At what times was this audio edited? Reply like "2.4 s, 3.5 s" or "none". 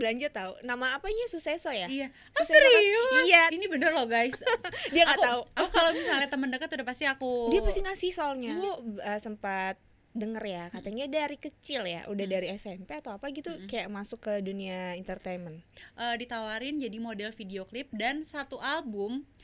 3.5 s, 8.5 s, 15.8 s